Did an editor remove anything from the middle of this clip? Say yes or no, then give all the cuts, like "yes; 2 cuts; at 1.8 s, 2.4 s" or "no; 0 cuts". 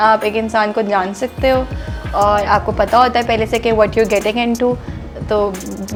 no; 0 cuts